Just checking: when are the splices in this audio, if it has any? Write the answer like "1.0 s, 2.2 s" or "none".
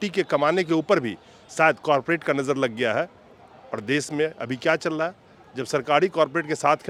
none